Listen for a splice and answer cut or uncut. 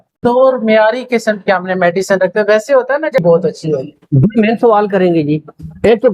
cut